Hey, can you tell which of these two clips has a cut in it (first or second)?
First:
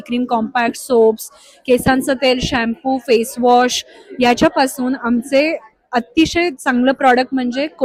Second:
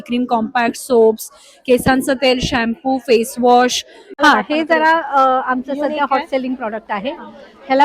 second